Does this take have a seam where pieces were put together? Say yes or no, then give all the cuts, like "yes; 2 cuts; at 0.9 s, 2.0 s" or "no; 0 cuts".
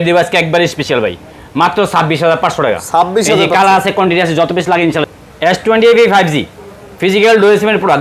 yes; 1 cut; at 5.0 s